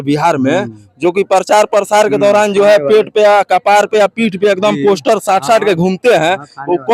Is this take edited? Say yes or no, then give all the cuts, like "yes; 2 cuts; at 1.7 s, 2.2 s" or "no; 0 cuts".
no; 0 cuts